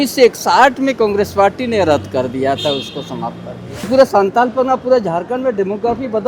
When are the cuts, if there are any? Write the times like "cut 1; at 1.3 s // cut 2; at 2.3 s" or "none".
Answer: cut 1; at 3.9 s